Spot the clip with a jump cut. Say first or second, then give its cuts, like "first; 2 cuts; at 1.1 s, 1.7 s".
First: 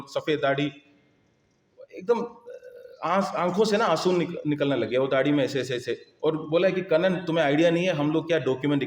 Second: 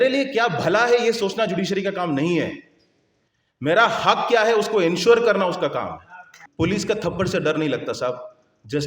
second; 1 cut; at 6.4 s